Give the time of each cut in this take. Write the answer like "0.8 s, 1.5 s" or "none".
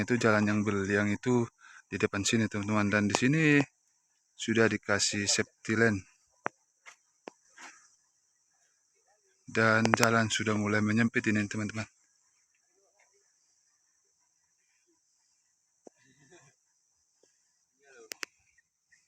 none